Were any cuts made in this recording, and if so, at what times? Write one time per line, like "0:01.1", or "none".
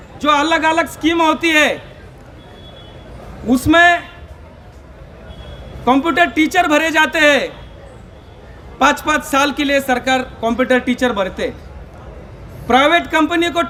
none